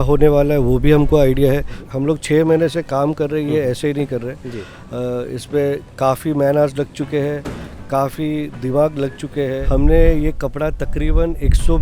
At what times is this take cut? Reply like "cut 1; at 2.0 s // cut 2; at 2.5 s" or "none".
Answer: cut 1; at 1.8 s // cut 2; at 9.6 s